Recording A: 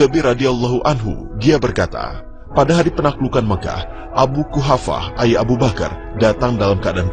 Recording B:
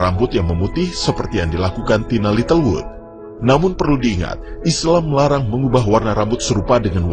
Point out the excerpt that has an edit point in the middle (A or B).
B